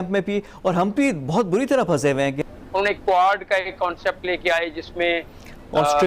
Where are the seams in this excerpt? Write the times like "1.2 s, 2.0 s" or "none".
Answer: 2.5 s